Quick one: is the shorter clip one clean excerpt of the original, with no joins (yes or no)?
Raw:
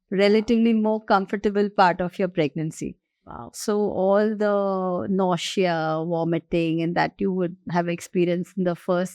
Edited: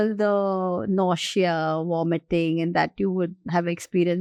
yes